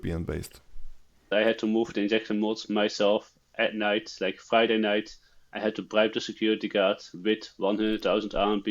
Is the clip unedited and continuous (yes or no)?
no